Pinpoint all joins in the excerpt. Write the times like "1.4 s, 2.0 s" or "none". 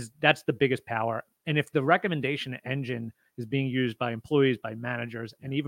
none